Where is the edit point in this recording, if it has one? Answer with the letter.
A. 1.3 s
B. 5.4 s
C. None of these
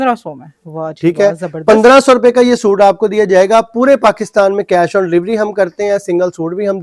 C